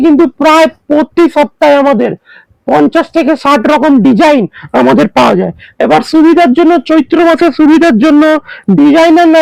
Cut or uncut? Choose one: uncut